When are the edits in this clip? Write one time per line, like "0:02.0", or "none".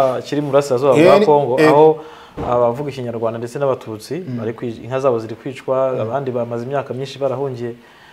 none